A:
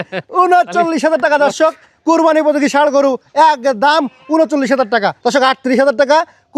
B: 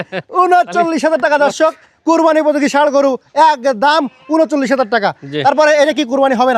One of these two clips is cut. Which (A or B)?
A